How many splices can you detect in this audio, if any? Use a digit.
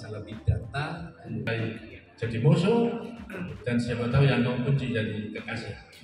1